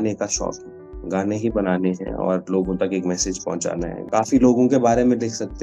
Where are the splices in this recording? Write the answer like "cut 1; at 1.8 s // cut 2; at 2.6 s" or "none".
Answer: cut 1; at 4.0 s